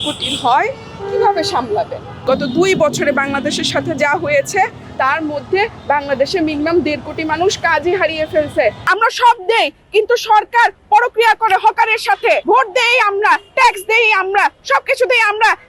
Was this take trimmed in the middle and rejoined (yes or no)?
yes